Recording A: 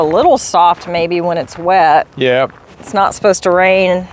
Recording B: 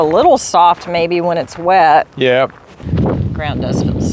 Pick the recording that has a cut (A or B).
B